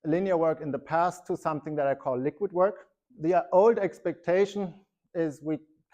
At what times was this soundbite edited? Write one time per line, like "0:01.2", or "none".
0:03.0